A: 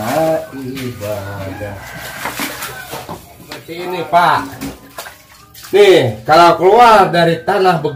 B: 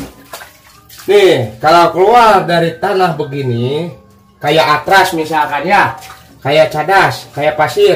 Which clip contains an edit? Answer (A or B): A